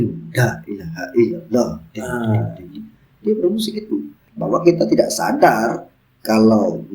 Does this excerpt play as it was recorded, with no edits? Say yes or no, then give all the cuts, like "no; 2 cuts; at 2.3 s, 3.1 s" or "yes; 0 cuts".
no; 1 cut; at 4.2 s